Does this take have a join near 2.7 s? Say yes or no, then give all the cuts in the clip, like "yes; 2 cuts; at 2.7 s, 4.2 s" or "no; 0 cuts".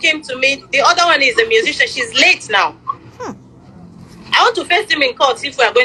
no; 0 cuts